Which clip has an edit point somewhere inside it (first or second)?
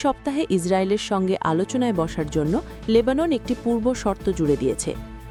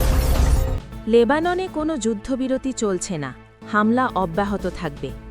second